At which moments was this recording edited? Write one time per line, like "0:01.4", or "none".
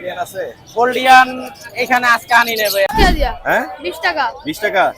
0:02.9